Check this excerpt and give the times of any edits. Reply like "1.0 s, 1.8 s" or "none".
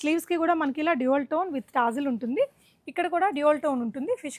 none

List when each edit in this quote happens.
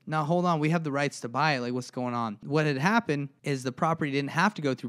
2.4 s, 3.3 s

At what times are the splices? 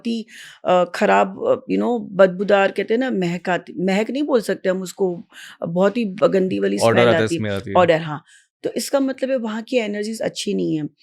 none

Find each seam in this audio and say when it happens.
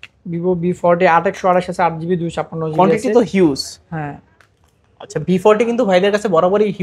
none

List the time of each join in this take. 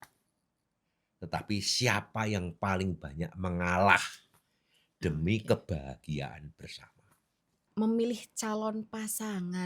7.6 s

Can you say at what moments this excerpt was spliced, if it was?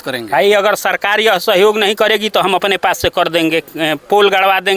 none

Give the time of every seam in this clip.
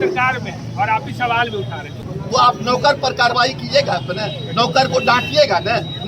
2.0 s

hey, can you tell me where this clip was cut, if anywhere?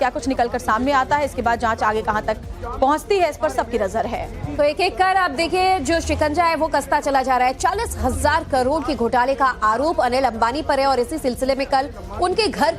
11.1 s

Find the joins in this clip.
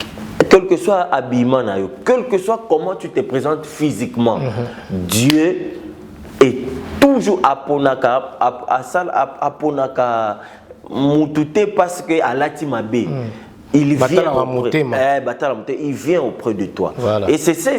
none

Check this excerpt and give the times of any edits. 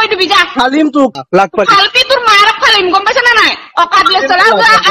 1.1 s

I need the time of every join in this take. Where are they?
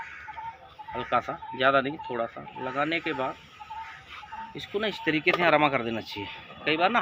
none

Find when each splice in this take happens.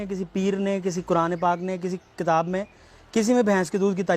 none

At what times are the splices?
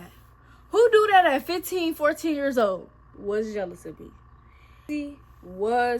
3.1 s, 4.8 s

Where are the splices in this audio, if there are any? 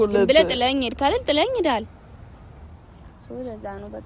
none

